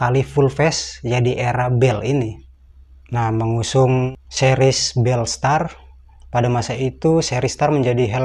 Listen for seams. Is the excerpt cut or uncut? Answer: uncut